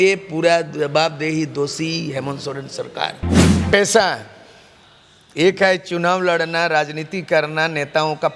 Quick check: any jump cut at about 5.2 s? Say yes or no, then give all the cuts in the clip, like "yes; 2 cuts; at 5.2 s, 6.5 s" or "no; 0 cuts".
no; 1 cut; at 3.3 s